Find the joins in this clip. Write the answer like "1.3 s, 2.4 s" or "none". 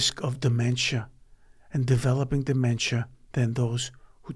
none